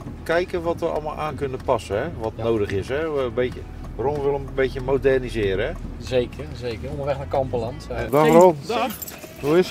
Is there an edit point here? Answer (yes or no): yes